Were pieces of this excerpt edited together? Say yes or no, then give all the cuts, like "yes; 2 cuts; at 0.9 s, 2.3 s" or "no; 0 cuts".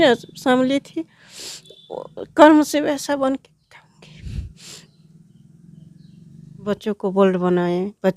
yes; 1 cut; at 6.6 s